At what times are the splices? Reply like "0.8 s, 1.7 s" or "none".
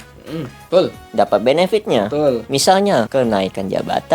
3.1 s